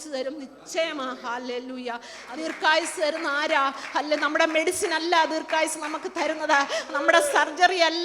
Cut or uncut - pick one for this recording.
cut